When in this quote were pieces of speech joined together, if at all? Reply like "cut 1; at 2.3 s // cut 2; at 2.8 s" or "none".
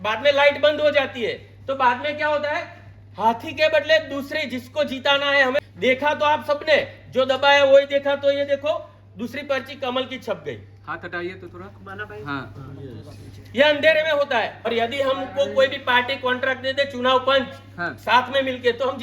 cut 1; at 5.6 s // cut 2; at 14.6 s